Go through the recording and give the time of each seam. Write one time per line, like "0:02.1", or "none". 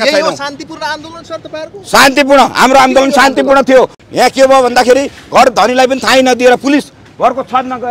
0:04.0